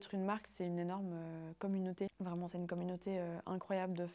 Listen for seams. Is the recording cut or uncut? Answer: cut